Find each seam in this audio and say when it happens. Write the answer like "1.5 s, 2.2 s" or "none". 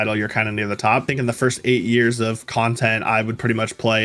1.1 s